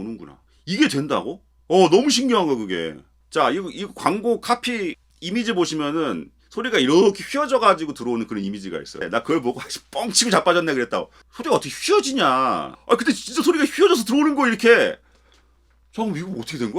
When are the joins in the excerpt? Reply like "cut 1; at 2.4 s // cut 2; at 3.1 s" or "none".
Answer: cut 1; at 5.1 s // cut 2; at 9.0 s